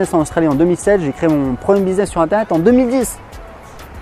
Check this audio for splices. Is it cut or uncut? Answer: uncut